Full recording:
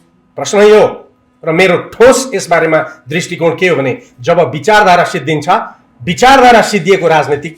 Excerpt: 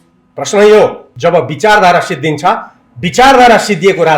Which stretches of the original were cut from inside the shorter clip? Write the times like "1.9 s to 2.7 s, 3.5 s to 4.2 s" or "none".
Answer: 1.1 s to 4.1 s